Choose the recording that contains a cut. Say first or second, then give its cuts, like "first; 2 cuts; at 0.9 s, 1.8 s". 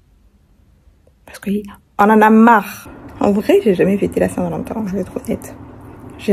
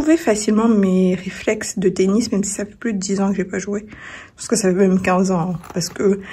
first; 1 cut; at 2.8 s